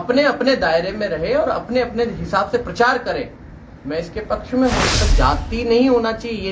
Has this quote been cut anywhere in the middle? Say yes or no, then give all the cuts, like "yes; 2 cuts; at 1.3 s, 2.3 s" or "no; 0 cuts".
yes; 1 cut; at 5.0 s